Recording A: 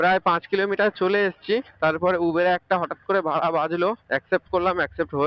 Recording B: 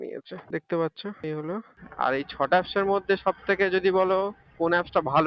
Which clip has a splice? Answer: B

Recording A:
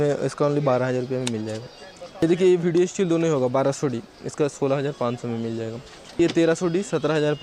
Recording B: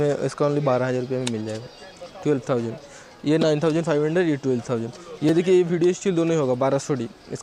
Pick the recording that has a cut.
A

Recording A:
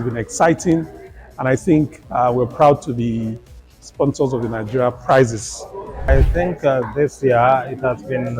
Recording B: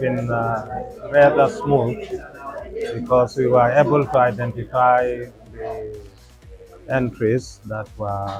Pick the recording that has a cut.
A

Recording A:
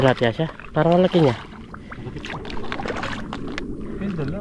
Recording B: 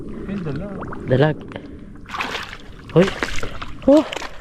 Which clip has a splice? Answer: B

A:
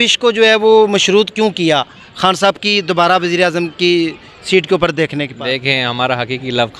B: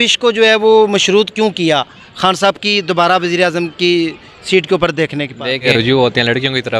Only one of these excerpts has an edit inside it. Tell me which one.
B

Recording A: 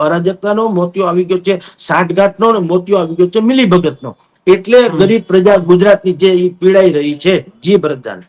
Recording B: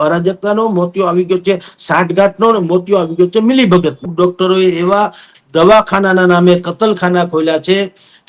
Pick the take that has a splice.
B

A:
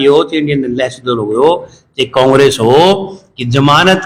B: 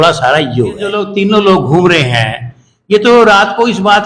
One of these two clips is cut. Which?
B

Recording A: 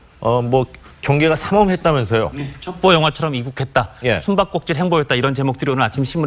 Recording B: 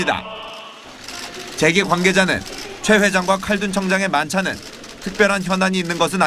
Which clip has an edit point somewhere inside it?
B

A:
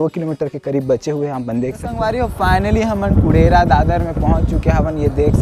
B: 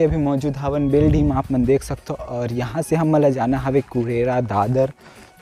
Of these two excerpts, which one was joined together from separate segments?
A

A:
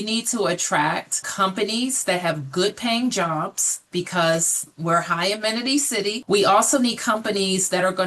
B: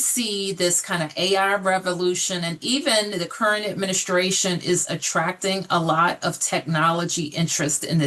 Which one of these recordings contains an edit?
A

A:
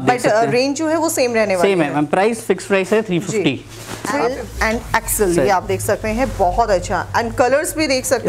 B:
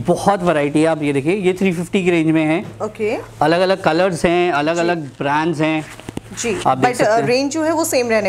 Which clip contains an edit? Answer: A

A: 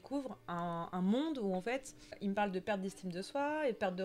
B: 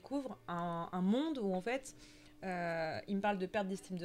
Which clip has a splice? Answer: A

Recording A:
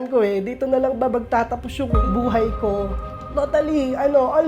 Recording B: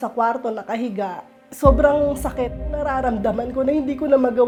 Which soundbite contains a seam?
A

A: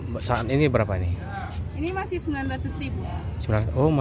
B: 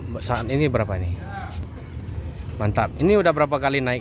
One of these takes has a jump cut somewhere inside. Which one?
B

